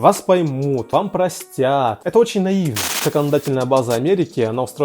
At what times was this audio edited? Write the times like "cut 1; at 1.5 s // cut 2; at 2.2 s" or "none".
cut 1; at 0.9 s // cut 2; at 2.0 s // cut 3; at 3.0 s